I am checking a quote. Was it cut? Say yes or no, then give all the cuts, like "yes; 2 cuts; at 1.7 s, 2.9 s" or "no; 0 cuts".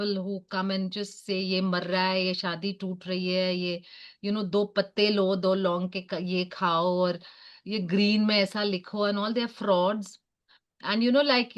no; 0 cuts